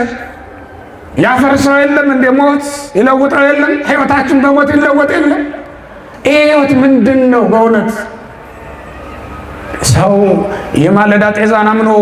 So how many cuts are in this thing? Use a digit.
0